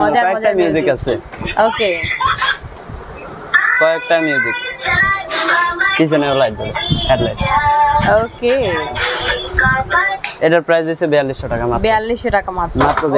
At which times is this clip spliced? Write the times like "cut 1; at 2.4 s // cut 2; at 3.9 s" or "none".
none